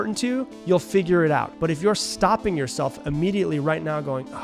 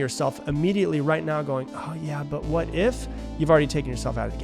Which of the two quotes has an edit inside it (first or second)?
first